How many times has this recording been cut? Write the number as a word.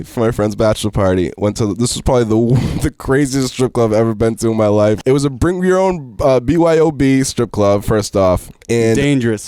two